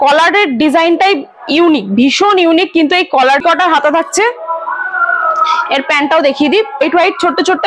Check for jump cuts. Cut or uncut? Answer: cut